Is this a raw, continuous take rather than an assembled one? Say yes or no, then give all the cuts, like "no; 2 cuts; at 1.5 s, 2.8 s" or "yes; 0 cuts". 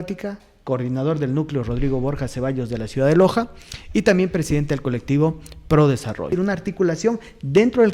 no; 1 cut; at 6.3 s